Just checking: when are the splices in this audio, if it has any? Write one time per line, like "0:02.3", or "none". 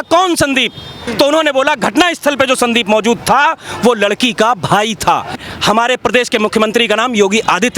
0:01.0
0:05.4